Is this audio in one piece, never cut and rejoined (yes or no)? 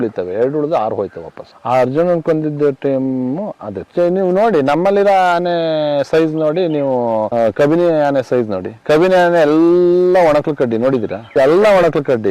no